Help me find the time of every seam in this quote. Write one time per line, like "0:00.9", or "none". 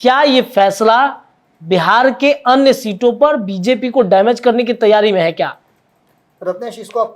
none